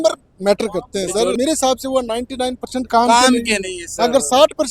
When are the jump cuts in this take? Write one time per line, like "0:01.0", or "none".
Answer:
0:01.4